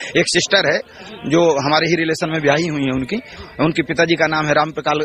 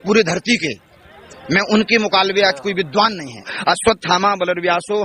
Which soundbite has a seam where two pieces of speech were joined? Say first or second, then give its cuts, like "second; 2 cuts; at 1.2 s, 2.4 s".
second; 1 cut; at 3.5 s